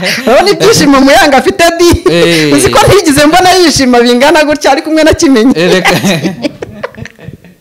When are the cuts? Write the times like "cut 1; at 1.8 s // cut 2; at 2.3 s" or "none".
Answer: none